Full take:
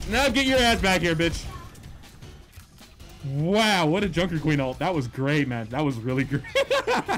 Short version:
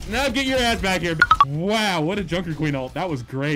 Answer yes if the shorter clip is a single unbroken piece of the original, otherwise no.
no